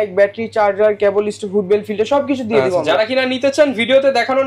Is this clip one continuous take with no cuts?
yes; 0 cuts

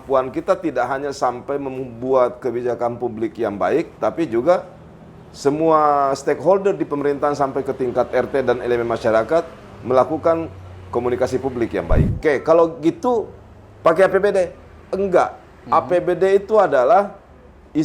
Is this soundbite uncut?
no; 1 cut; at 12.1 s

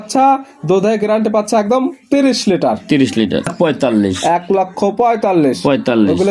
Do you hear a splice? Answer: yes; 1 cut; at 3.5 s

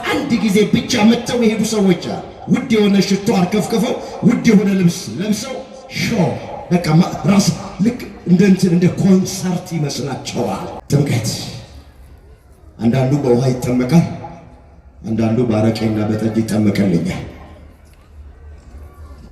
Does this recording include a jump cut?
yes; 1 cut; at 10.7 s

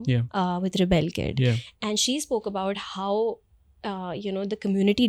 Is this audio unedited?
yes; 0 cuts

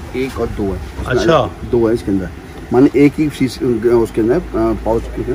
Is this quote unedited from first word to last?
yes; 0 cuts

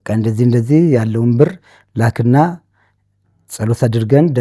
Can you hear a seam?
no; 0 cuts

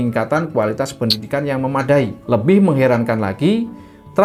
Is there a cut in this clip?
no; 0 cuts

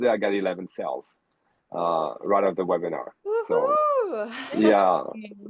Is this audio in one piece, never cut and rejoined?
yes; 0 cuts

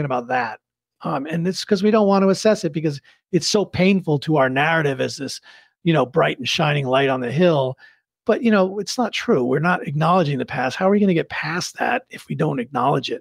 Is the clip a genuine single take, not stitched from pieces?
no; 2 cuts; at 0.9 s, 8.0 s

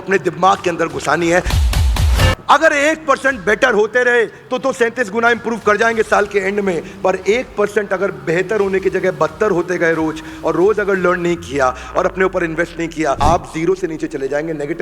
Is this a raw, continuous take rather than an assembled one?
no; 2 cuts; at 1.8 s, 13.2 s

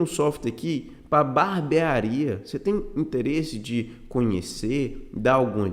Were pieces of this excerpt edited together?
no; 0 cuts

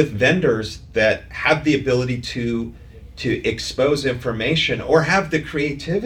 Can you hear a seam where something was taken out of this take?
no; 0 cuts

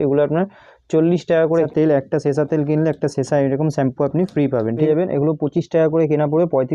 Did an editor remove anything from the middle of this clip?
yes; 2 cuts; at 1.7 s, 4.8 s

